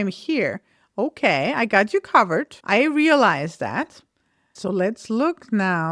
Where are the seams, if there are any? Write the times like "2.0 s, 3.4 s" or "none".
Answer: 2.6 s, 4.5 s